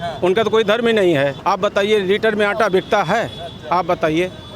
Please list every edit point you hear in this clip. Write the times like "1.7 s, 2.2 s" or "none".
1.4 s